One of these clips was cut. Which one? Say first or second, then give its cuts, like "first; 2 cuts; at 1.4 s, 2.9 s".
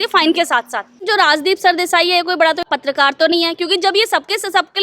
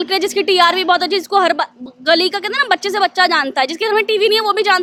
first; 2 cuts; at 1.1 s, 2.7 s